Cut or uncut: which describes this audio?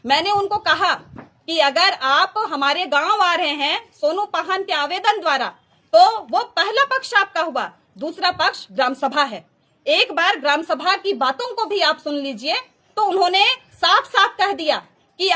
uncut